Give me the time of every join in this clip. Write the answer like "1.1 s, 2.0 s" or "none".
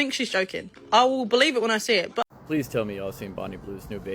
2.3 s